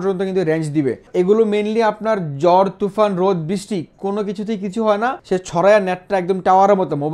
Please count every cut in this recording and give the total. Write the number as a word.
two